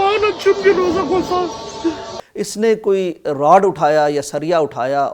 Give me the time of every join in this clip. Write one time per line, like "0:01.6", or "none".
0:02.1

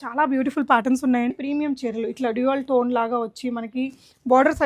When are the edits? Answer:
0:01.3

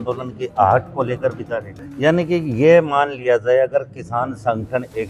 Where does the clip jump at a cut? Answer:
0:01.8

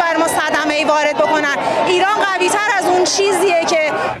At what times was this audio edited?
none

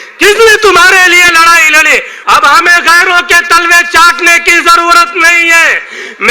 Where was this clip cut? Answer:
0:02.1

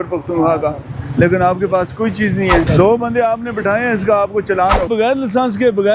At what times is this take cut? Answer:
0:02.7
0:04.9

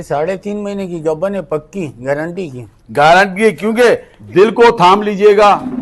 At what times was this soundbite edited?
0:04.1

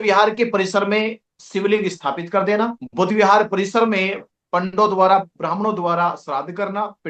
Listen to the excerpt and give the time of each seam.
0:02.8

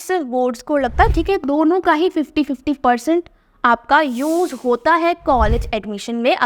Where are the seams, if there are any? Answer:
0:01.1

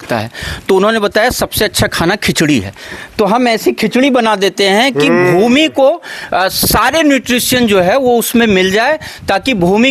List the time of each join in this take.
none

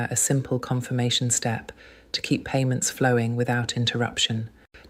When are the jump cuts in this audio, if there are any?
0:02.7

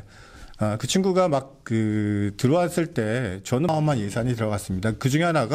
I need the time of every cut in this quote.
0:03.7

